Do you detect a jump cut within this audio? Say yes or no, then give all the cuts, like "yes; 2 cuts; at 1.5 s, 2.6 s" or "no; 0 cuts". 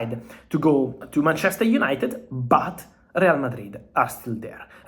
yes; 1 cut; at 1.0 s